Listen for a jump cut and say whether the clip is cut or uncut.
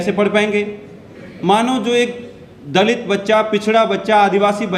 uncut